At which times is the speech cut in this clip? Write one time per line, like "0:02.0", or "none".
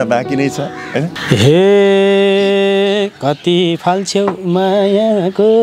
0:01.1